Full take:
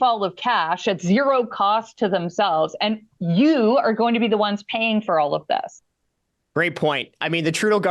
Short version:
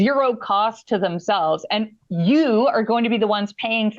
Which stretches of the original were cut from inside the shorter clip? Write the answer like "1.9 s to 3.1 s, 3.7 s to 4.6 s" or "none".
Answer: none